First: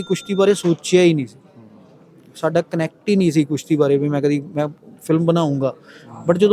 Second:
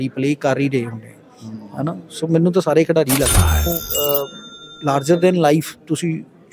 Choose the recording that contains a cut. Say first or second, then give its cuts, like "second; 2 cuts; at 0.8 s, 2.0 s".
second; 1 cut; at 3.7 s